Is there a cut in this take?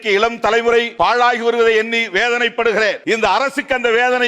yes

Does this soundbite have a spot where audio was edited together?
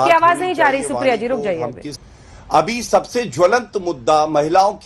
yes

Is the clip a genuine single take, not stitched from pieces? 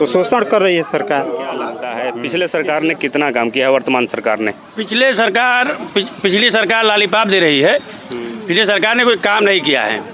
no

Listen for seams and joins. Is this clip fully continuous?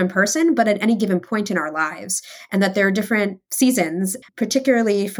no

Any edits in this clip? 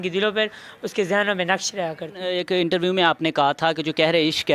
yes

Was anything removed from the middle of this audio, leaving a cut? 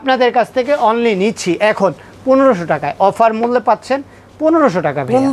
no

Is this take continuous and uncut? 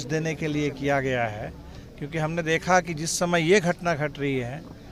yes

